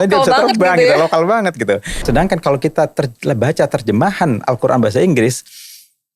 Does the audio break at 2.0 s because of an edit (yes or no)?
yes